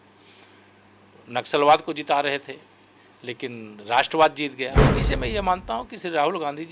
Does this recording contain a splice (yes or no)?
yes